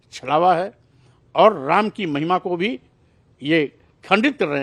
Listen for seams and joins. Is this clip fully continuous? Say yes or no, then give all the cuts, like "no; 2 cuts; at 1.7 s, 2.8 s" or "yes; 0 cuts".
yes; 0 cuts